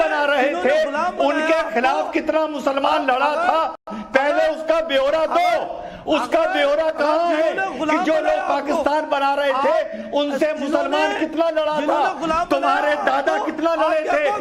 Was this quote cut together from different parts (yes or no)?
no